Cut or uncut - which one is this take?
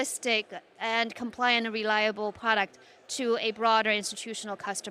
uncut